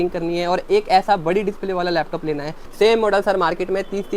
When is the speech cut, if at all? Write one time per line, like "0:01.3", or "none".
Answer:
0:02.6